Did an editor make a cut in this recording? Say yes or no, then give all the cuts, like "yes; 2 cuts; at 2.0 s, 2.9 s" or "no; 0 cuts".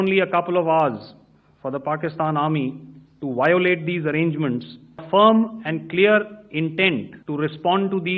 yes; 2 cuts; at 5.0 s, 7.2 s